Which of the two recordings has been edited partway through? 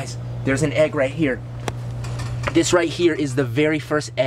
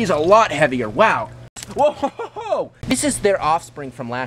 second; 2 cuts; at 1.5 s, 2.8 s

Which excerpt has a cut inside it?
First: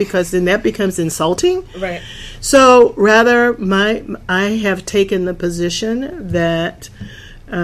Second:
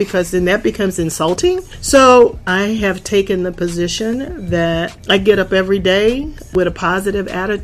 second; 4 cuts; at 1.7 s, 2.3 s, 5.0 s, 6.5 s

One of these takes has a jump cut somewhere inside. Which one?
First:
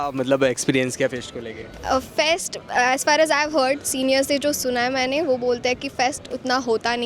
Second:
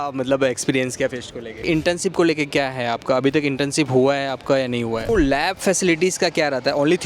second; 2 cuts; at 1.6 s, 5.1 s

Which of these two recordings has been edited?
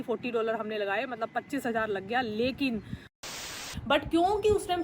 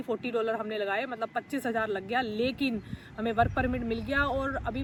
first; 1 cut; at 3.2 s

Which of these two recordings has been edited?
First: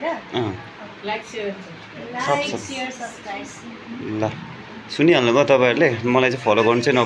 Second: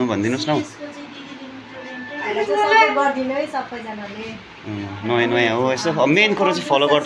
second; 1 cut; at 2.3 s

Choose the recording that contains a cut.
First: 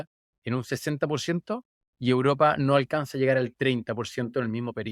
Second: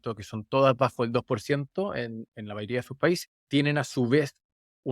second; 1 cut; at 3.3 s

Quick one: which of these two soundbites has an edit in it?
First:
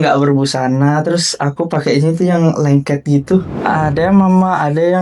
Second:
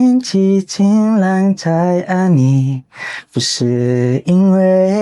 first; 1 cut; at 3.6 s

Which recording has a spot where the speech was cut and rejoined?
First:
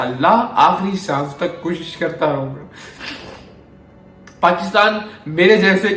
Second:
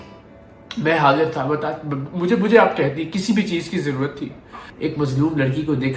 second; 1 cut; at 4.6 s

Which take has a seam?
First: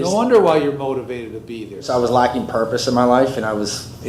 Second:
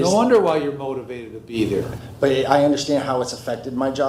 first; 1 cut; at 1.7 s

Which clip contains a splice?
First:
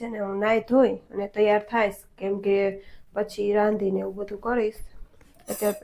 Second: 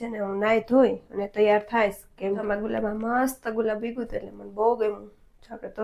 second; 1 cut; at 2.4 s

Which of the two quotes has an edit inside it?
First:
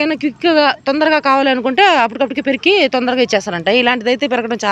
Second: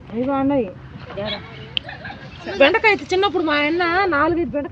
second; 1 cut; at 2.5 s

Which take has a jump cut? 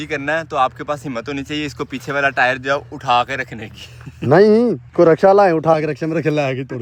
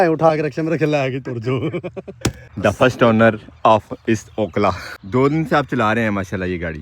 second; 2 cuts; at 2.4 s, 4.9 s

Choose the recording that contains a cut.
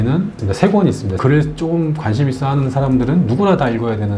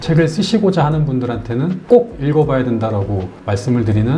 first; 1 cut; at 1.2 s

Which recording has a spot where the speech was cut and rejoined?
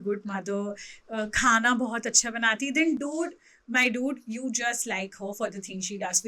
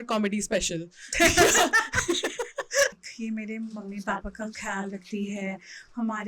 second; 1 cut; at 3.0 s

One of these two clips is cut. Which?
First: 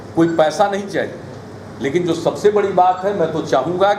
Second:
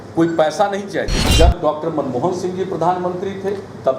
second; 1 cut; at 1.2 s

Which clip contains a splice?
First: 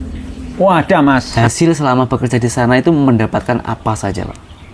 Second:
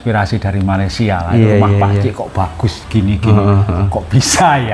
first; 1 cut; at 1.3 s

